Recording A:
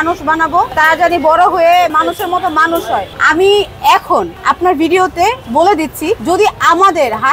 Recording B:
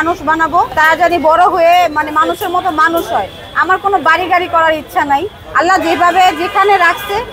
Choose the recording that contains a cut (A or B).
A